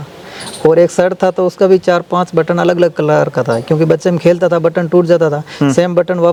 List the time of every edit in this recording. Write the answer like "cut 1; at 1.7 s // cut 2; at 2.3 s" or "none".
none

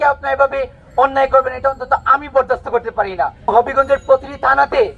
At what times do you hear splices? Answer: cut 1; at 3.5 s

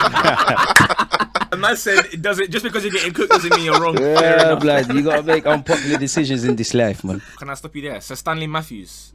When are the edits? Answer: cut 1; at 1.5 s // cut 2; at 7.4 s

